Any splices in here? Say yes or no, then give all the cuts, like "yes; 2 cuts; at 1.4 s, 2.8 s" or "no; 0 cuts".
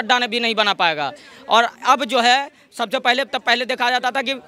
no; 0 cuts